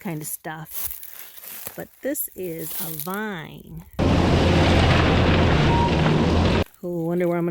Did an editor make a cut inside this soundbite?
yes; 2 cuts; at 4.0 s, 6.6 s

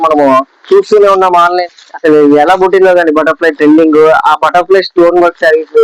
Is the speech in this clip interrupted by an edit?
yes; 1 cut; at 1.6 s

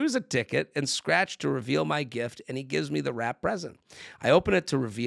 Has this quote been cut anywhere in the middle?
no; 0 cuts

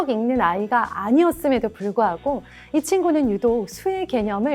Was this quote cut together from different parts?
no; 0 cuts

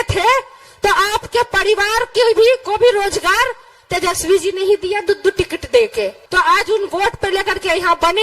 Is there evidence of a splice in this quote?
yes; 1 cut; at 6.2 s

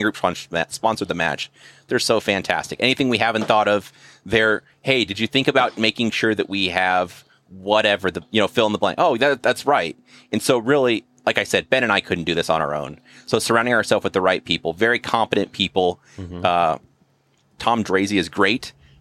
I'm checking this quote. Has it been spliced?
yes; 1 cut; at 17.5 s

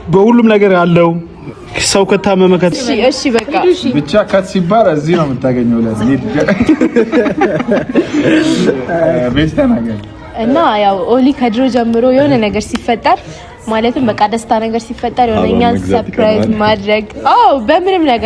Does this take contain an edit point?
yes; 1 cut; at 2.7 s

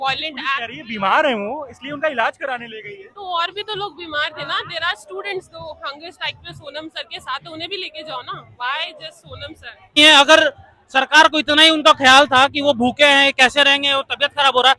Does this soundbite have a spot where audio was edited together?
yes; 1 cut; at 10.0 s

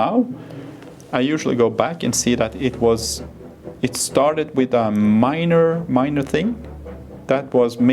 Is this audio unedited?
yes; 0 cuts

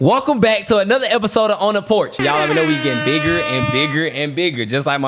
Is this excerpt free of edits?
no; 1 cut; at 2.2 s

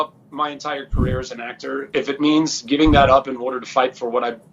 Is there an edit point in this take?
no; 0 cuts

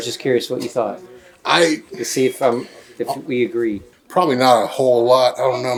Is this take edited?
no; 0 cuts

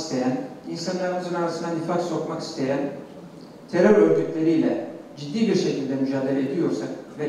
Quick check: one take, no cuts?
yes; 0 cuts

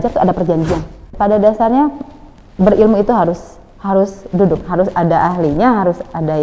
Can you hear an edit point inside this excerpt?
yes; 1 cut; at 1.1 s

